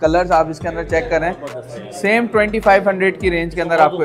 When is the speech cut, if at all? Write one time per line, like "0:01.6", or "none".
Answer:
none